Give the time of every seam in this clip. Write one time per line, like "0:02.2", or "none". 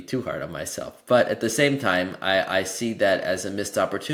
none

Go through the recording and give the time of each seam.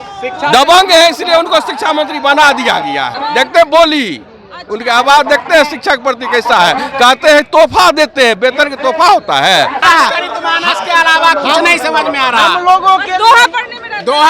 0:03.1
0:09.8

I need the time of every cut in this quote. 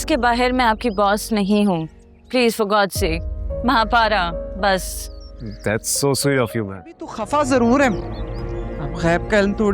0:07.1

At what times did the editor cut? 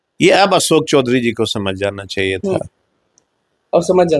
none

